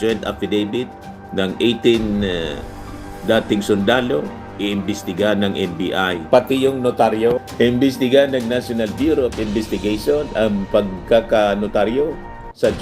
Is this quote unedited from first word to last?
yes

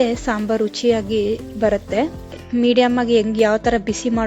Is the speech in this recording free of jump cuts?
no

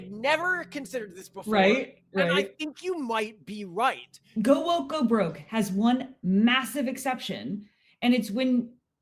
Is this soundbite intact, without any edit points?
no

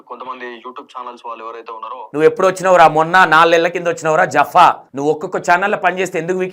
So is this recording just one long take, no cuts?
no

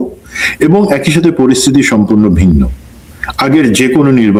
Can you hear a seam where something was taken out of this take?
no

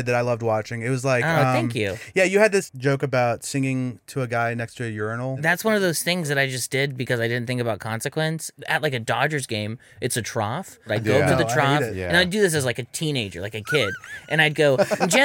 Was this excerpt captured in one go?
no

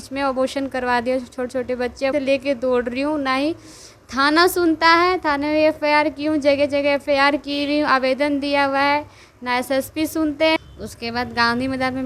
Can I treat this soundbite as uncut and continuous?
no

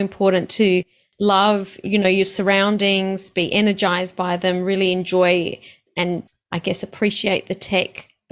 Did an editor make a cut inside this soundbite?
no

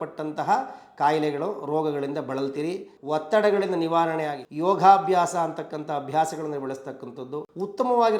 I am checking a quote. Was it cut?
yes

